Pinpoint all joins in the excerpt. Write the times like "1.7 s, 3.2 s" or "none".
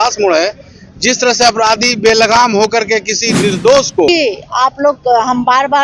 4.1 s